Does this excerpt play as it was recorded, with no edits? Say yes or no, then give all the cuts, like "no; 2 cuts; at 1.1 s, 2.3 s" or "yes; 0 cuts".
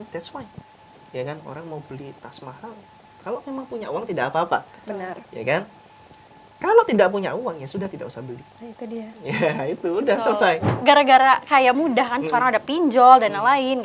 no; 1 cut; at 10.7 s